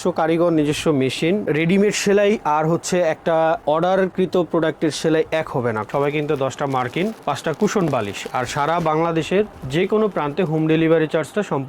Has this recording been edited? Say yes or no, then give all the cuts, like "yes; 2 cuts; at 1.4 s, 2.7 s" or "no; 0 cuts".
yes; 3 cuts; at 1.5 s, 3.8 s, 5.9 s